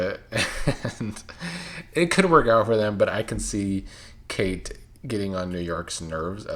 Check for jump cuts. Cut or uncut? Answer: uncut